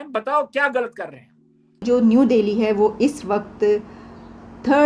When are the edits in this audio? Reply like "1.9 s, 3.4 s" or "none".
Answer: 1.8 s